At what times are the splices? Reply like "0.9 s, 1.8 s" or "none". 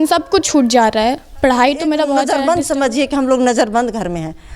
2.3 s